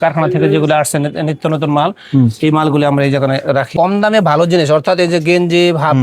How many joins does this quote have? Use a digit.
1